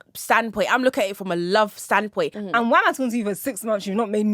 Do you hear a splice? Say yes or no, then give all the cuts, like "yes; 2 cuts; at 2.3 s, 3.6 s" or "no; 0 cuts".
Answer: yes; 1 cut; at 2.3 s